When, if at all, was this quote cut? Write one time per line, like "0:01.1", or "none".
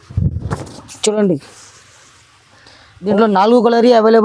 0:03.1